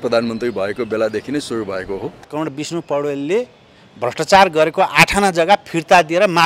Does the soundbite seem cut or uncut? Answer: cut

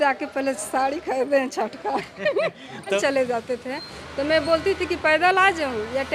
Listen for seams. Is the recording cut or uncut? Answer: cut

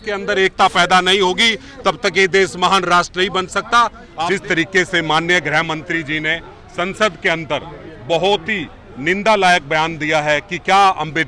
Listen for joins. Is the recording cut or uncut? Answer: cut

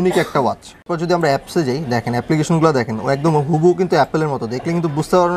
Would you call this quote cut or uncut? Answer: cut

